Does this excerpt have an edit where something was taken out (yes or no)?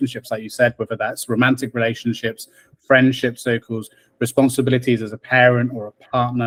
no